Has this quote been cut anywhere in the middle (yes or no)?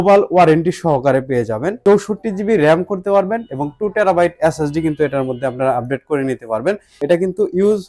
yes